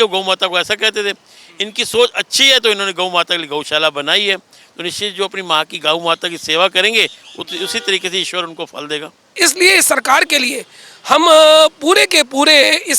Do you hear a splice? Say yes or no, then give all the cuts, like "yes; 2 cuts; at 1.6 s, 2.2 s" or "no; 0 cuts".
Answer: yes; 1 cut; at 9.3 s